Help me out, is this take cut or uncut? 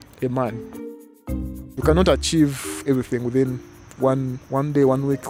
cut